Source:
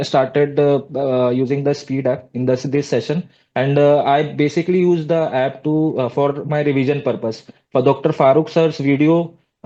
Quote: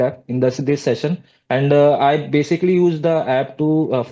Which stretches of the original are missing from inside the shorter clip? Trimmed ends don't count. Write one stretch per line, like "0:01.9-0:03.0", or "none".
none